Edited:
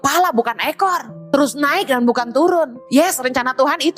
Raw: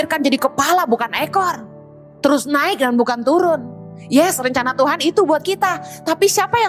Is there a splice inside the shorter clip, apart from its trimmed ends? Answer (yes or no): yes